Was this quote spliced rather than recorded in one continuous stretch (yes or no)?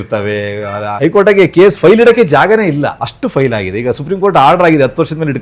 no